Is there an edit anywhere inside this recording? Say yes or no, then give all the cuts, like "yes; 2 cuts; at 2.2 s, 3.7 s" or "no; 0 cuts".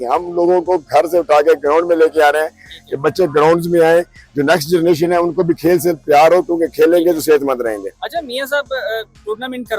no; 0 cuts